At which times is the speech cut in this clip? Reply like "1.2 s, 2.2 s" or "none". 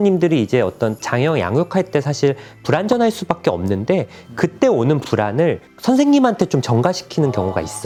none